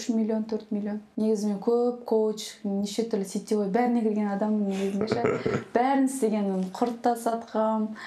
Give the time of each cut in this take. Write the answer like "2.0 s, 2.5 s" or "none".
1.0 s